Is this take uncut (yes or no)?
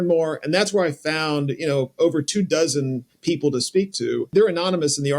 no